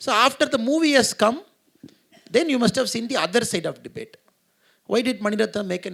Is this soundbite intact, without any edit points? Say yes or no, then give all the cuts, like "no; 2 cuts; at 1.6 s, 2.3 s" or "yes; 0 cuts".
yes; 0 cuts